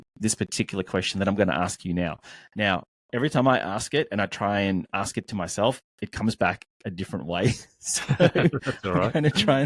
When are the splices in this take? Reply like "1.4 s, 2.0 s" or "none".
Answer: none